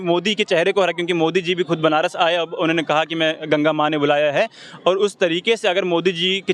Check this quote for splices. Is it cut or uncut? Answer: uncut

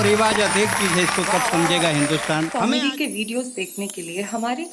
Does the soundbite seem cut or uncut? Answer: cut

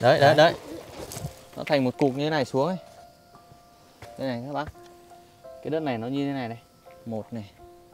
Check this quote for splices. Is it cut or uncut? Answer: cut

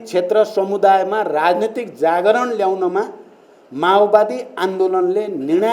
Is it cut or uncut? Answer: uncut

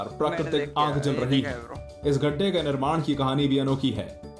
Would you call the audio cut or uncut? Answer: uncut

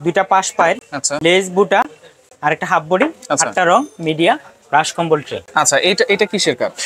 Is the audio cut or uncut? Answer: uncut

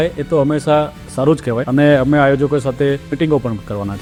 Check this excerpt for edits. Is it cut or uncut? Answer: uncut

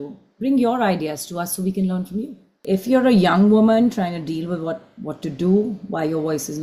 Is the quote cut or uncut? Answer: cut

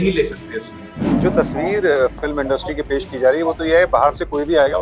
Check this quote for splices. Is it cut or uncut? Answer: cut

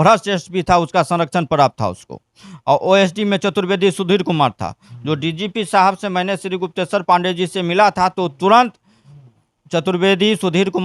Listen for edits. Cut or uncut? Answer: uncut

